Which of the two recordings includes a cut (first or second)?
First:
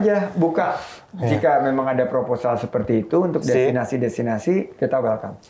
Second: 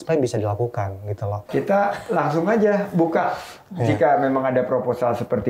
second